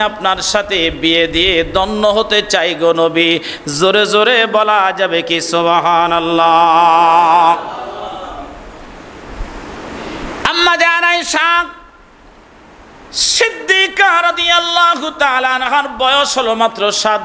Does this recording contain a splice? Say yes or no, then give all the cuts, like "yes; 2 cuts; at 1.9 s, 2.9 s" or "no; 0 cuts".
no; 0 cuts